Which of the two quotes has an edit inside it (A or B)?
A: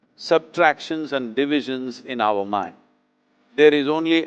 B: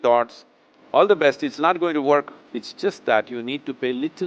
B